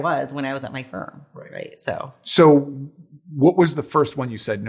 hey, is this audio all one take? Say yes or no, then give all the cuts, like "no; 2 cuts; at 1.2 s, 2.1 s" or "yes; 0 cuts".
no; 1 cut; at 2.2 s